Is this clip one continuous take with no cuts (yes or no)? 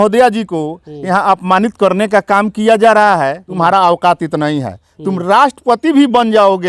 no